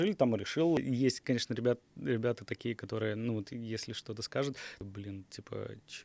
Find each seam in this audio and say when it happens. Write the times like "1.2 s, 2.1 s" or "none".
0.8 s, 4.7 s